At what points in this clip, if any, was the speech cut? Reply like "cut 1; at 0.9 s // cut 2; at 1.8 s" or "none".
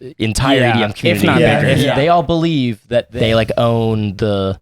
cut 1; at 1.9 s // cut 2; at 3.1 s